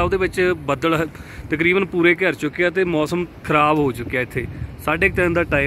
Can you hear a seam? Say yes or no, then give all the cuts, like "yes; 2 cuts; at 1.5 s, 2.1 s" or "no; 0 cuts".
no; 0 cuts